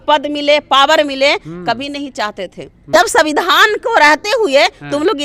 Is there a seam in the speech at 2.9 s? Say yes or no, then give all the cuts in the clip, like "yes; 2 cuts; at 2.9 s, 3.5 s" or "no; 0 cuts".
yes; 1 cut; at 2.9 s